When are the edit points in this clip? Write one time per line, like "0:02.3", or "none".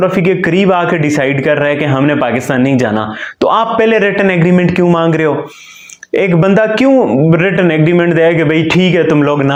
none